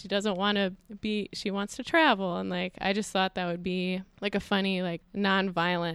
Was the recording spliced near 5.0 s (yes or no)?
yes